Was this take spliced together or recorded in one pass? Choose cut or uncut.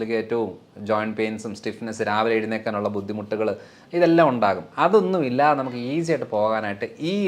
uncut